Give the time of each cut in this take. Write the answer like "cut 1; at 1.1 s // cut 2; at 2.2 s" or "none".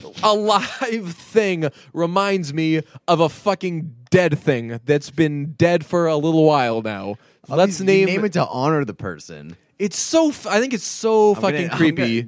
none